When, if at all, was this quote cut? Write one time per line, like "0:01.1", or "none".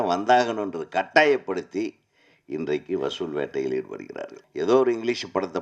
0:04.4